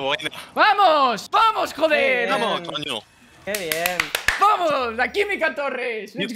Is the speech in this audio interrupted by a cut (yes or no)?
yes